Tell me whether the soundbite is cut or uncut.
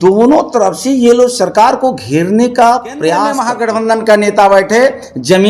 cut